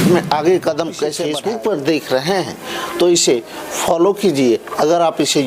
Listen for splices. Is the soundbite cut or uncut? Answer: cut